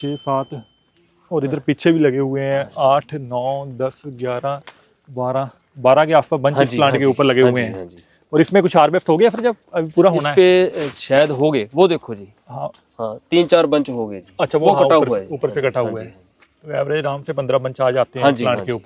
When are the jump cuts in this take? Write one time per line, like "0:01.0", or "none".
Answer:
none